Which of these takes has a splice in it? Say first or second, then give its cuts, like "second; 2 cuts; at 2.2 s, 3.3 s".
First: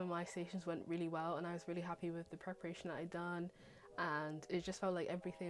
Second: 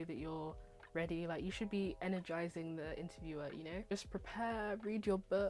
second; 1 cut; at 3.9 s